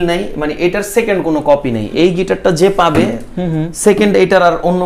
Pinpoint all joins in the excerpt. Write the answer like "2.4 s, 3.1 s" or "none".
none